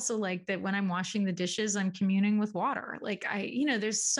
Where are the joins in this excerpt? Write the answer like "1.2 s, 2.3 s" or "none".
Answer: none